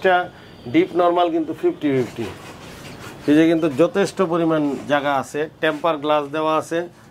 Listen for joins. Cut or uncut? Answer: uncut